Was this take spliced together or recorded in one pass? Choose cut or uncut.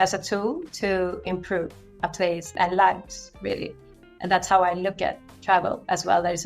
cut